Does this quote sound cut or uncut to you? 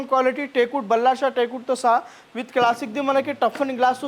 uncut